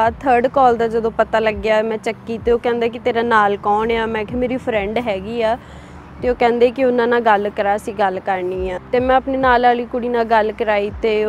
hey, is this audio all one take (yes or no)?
no